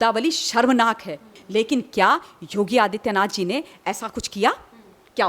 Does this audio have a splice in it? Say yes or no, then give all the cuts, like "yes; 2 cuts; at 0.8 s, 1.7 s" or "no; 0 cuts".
yes; 1 cut; at 1.3 s